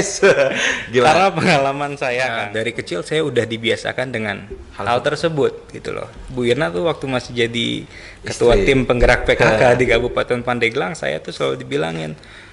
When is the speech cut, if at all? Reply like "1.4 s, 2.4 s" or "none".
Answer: 2.4 s